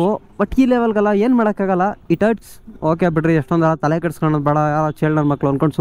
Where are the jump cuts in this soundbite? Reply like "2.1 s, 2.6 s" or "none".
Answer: none